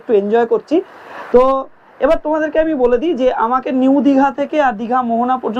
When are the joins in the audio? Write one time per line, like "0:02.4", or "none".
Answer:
none